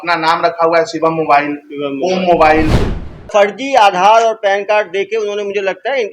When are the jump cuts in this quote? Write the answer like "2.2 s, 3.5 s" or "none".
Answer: 3.2 s